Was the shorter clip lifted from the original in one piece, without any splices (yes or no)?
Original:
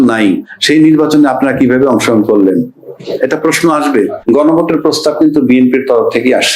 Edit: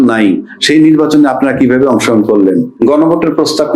no